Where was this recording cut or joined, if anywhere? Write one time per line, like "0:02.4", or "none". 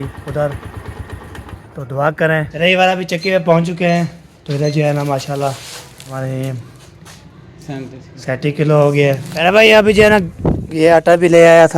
0:02.5
0:06.1
0:09.4

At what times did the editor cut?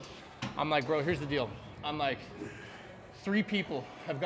none

